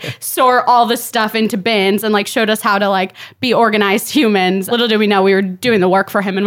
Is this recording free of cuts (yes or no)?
no